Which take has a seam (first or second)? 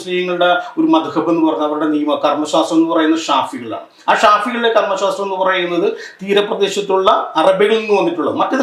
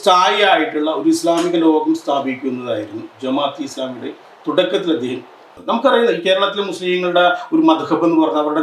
second